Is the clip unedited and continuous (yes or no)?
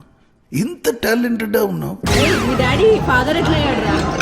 no